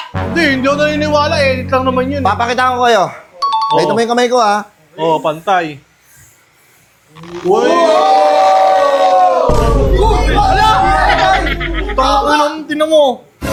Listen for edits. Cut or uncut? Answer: uncut